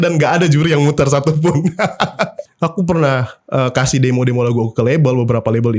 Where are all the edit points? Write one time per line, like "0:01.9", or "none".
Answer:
0:02.4